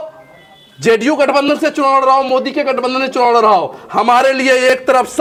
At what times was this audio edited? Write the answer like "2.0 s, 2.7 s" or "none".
none

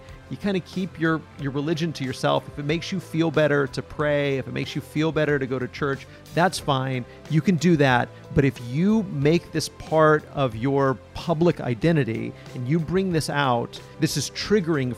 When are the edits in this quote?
13.8 s

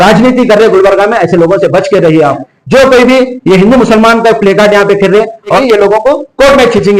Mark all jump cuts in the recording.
2.5 s, 5.6 s

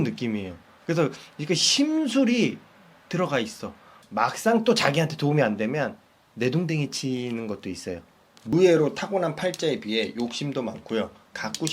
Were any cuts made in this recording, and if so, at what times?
4.0 s, 8.5 s

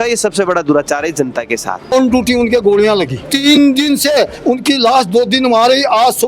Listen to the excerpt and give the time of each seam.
1.9 s, 3.2 s

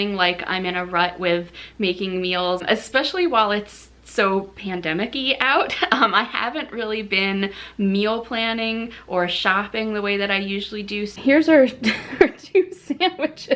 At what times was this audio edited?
2.6 s, 11.2 s

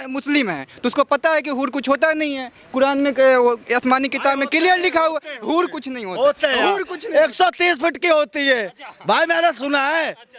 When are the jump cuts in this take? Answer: none

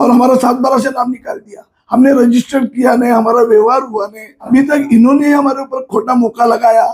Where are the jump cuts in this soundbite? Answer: 4.5 s

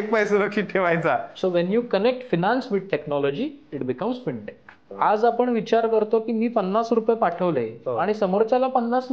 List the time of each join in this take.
1.3 s, 4.9 s

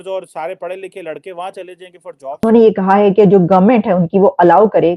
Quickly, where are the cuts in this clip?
2.4 s

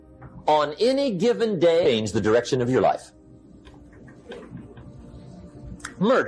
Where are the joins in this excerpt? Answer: 1.8 s

